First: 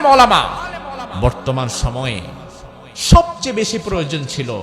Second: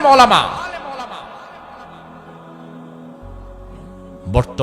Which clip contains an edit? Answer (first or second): first